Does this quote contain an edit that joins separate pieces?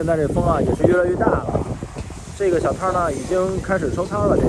no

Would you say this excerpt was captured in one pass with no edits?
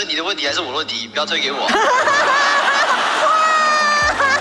yes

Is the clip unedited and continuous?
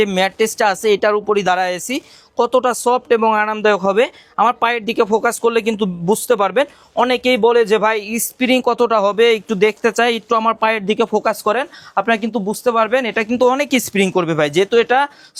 yes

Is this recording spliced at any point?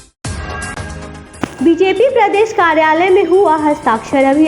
yes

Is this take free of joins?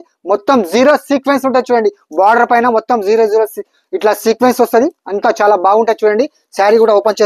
yes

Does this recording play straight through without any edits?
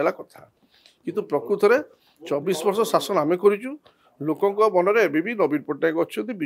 yes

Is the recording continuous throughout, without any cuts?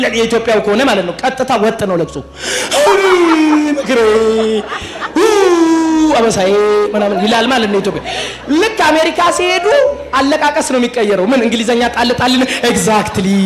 yes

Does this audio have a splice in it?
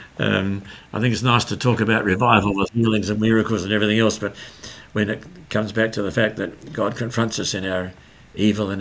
no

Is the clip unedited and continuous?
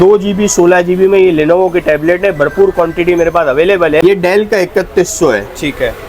no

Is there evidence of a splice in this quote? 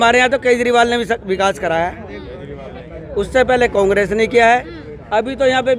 no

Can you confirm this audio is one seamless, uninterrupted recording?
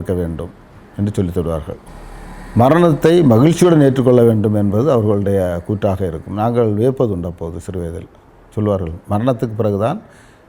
no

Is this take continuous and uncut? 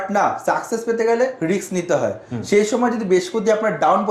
yes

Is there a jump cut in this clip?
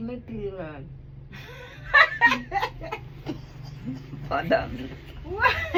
no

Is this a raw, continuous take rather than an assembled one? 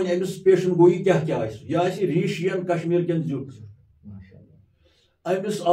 yes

